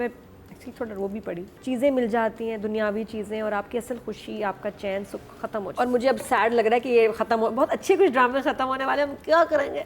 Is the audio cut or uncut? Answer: cut